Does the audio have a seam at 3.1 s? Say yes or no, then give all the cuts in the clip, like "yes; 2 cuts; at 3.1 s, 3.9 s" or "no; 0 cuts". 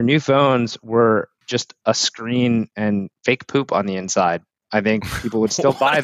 yes; 2 cuts; at 1.4 s, 3.1 s